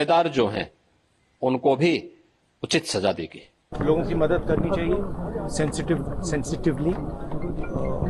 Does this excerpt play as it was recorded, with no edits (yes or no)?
no